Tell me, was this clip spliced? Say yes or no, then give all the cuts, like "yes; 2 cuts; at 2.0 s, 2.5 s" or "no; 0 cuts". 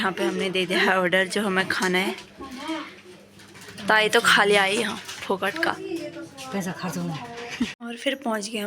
yes; 1 cut; at 7.8 s